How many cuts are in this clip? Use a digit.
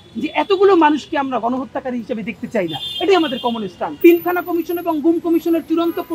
1